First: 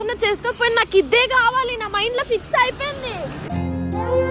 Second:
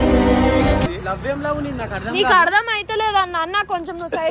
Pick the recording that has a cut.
second; 1 cut; at 1.0 s

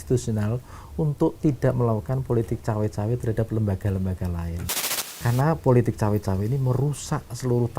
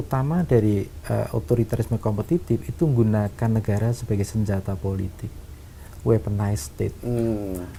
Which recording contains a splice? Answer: first; 1 cut; at 5.0 s

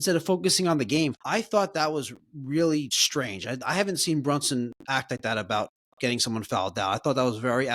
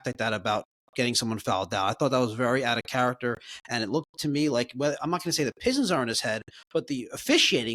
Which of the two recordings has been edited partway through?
first; 2 cuts; at 1.1 s, 3.0 s

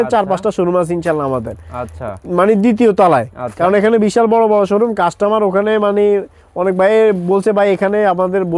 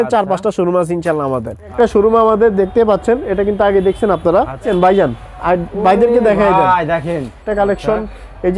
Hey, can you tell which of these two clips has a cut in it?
second; 3 cuts; at 1.7 s, 4.7 s, 7.5 s

